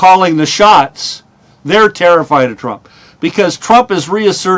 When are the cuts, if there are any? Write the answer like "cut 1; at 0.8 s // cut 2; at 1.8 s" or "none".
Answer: cut 1; at 1.5 s